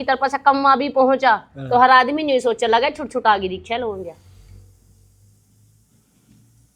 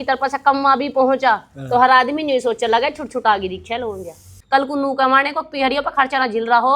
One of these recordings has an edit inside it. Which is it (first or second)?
second